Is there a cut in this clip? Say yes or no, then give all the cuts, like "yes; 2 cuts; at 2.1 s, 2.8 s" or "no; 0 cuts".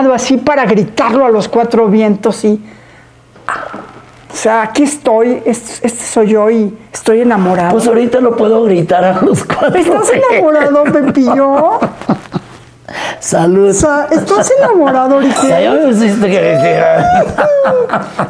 no; 0 cuts